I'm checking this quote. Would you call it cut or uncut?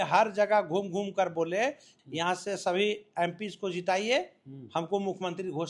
cut